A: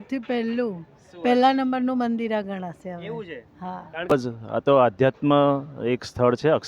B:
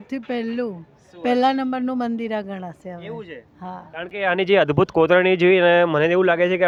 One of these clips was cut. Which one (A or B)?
A